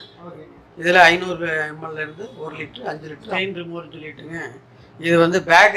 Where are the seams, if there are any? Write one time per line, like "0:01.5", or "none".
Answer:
0:03.2